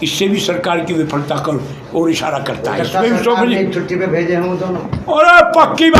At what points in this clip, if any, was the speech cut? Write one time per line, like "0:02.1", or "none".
none